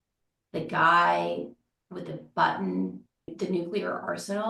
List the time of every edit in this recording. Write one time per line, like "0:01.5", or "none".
0:03.3